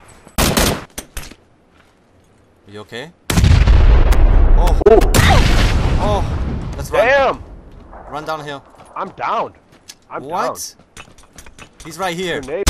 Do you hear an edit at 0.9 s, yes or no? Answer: yes